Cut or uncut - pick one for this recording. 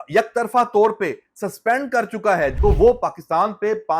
cut